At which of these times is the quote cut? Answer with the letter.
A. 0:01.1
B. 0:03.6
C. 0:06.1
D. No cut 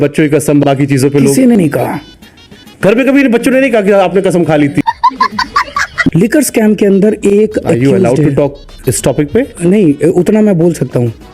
C